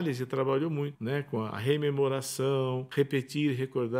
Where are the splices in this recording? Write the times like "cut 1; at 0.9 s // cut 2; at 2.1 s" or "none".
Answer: cut 1; at 1.0 s // cut 2; at 2.8 s